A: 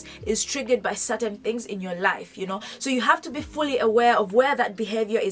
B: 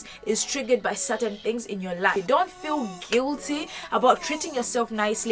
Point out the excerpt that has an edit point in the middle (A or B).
B